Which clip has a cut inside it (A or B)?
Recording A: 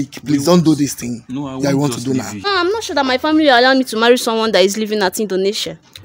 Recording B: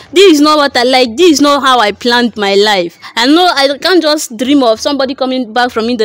A